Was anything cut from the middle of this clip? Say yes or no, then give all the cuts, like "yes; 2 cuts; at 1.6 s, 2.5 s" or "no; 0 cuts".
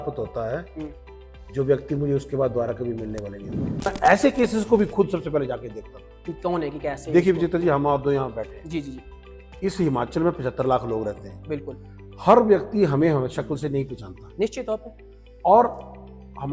yes; 1 cut; at 3.9 s